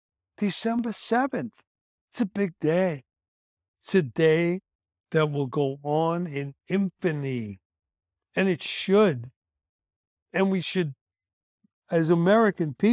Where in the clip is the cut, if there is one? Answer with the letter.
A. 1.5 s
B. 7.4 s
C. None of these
C